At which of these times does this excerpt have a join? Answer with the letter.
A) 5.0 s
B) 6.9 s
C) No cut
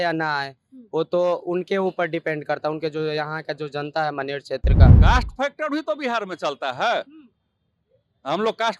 A